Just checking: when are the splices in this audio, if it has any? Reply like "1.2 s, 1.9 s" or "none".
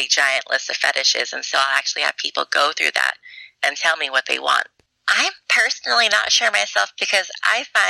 4.8 s